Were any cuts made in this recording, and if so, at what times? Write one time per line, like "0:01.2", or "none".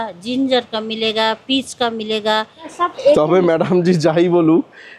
0:02.6

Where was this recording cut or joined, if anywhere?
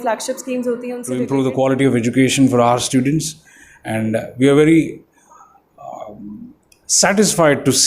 0:01.1

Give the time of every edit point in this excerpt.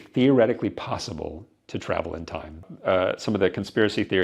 0:02.7

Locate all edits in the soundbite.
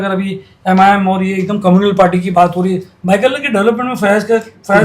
none

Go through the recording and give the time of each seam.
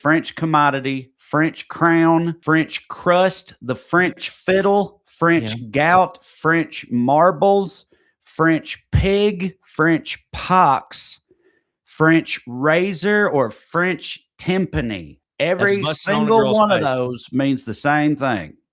0:02.4

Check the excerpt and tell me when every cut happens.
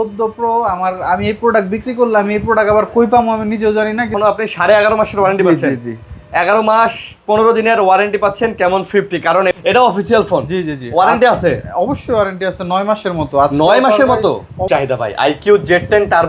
0:04.1
0:09.5
0:14.6

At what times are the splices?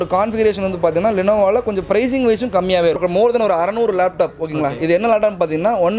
0:03.0

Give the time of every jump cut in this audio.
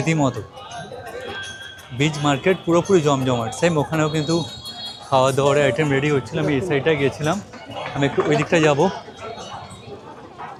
none

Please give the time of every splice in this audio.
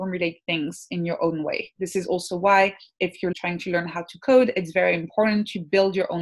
0:03.3

